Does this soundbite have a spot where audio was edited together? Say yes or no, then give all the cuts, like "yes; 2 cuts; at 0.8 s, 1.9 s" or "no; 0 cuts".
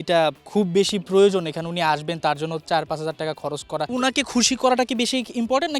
yes; 1 cut; at 3.9 s